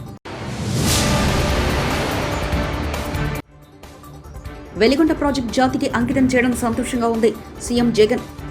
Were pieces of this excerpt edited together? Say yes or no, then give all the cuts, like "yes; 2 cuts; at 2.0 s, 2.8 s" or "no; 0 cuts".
yes; 1 cut; at 4.6 s